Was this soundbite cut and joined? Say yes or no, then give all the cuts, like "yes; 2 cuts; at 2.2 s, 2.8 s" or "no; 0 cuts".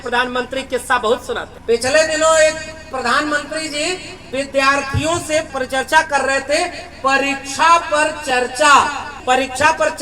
yes; 3 cuts; at 1.5 s, 5.5 s, 9.1 s